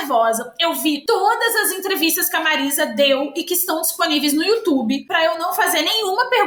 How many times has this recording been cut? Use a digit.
0